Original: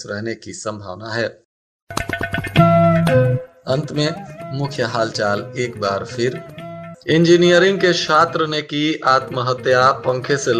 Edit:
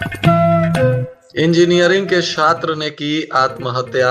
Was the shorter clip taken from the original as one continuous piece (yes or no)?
no